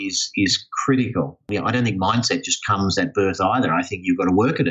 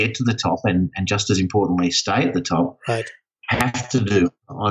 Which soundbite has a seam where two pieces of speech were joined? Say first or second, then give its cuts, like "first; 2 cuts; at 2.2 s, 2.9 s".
first; 1 cut; at 1.5 s